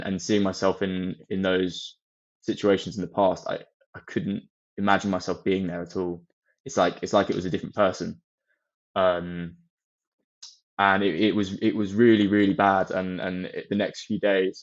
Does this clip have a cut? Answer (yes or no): no